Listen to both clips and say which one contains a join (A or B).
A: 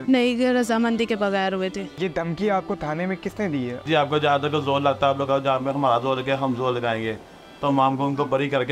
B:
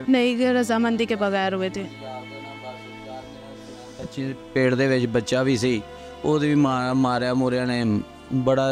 A